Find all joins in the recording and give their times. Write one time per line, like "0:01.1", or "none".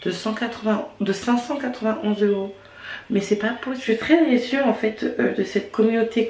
0:03.8